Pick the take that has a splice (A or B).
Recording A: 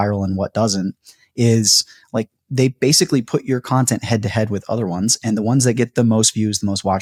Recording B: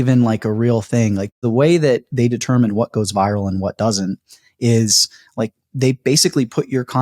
B